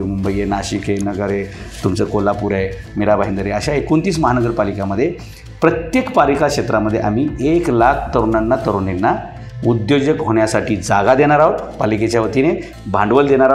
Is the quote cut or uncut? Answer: uncut